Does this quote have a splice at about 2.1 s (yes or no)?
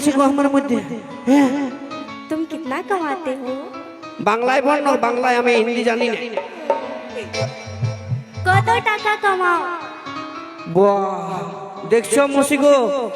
yes